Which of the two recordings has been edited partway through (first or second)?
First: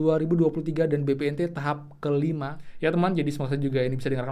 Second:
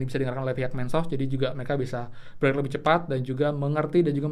first